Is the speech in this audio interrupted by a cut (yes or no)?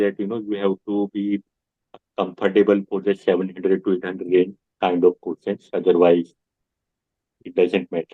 no